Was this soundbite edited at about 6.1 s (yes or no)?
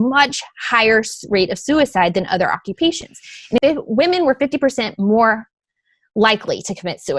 no